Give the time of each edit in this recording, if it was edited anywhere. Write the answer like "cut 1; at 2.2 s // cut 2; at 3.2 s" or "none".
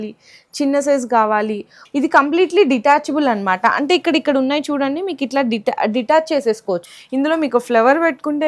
cut 1; at 1.8 s // cut 2; at 6.9 s